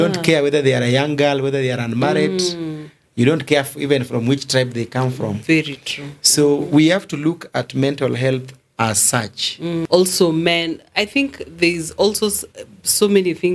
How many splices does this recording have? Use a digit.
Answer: 1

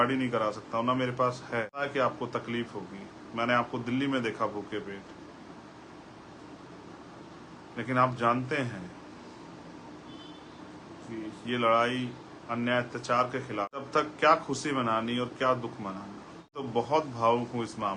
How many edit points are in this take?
3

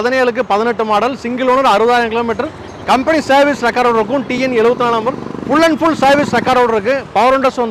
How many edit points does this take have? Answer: 0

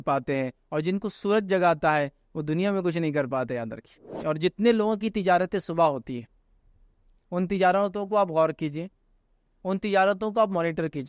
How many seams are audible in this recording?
1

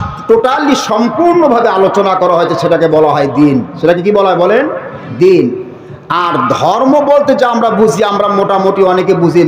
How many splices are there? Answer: 0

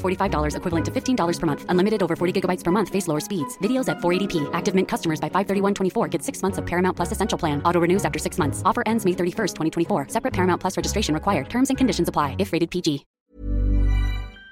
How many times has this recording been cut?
1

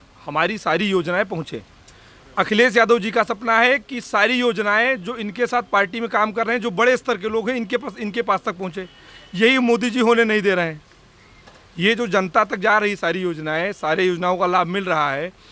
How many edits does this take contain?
0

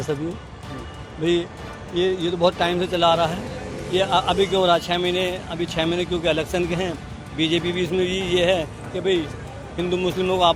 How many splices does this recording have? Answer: 0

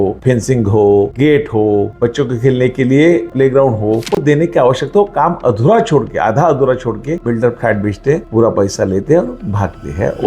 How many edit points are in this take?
1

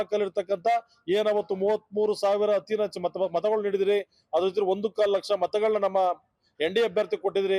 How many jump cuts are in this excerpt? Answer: 0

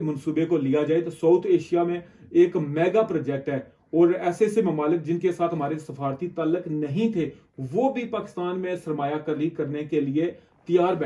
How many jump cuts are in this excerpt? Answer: 0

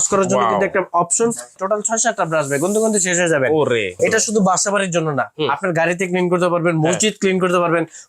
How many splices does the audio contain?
2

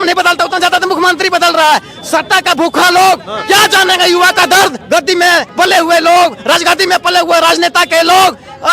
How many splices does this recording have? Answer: 1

